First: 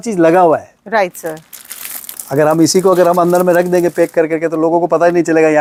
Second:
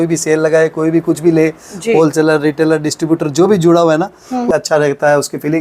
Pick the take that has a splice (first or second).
second